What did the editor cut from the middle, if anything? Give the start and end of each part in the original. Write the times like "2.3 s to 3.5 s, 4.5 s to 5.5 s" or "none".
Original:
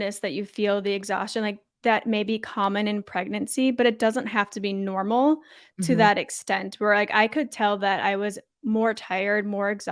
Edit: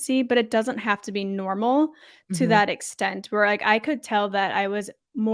none